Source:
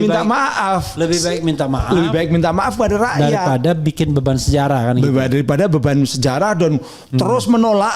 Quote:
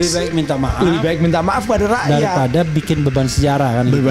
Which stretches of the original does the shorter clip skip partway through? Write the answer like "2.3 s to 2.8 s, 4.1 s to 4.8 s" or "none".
none